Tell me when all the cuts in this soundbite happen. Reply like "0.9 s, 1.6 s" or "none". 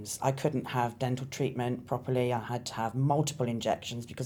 none